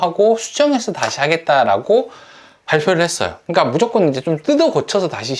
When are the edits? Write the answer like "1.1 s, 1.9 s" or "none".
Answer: none